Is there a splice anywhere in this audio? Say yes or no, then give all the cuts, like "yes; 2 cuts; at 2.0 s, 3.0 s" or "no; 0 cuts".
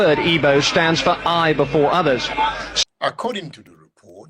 yes; 1 cut; at 2.7 s